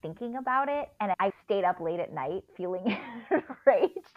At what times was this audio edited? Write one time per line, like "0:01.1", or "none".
0:01.1
0:02.5

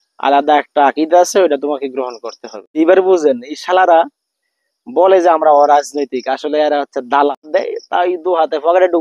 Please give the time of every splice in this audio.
0:02.8
0:07.5

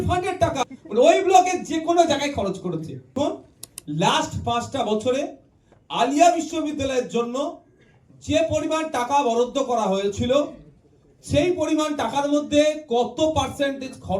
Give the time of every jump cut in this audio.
0:03.1

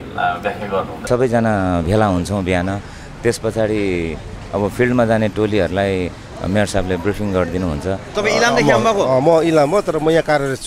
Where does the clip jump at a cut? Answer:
0:01.0
0:08.1

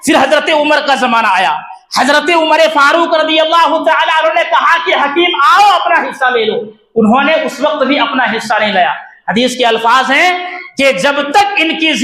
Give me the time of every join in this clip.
none

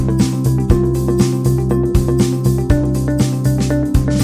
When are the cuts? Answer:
none

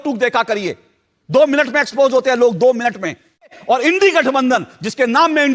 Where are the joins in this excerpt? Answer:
0:03.6

